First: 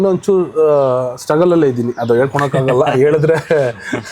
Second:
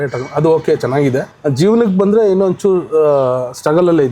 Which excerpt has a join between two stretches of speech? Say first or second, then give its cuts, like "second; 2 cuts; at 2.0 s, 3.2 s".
second; 1 cut; at 1.3 s